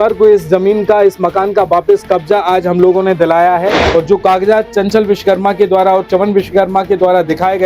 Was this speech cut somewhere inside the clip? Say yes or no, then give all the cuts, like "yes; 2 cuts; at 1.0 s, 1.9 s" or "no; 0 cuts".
yes; 1 cut; at 3.8 s